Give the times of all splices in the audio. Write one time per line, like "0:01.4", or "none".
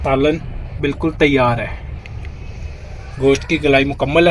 0:02.0